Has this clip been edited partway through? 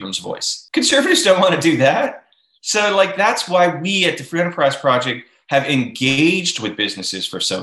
no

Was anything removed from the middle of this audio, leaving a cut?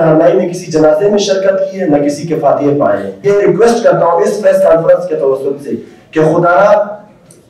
yes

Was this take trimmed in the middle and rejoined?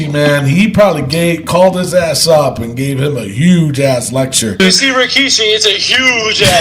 yes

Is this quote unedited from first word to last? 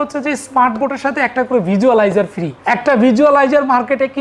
no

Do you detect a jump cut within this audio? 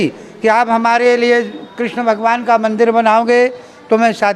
no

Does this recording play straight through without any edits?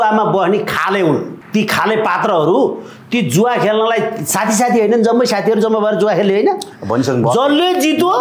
no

